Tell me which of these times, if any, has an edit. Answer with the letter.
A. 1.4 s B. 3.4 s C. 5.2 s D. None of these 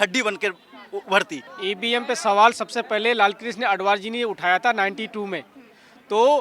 A